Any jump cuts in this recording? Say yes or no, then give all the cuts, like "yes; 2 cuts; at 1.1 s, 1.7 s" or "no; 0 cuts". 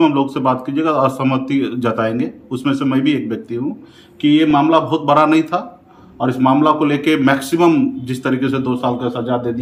no; 0 cuts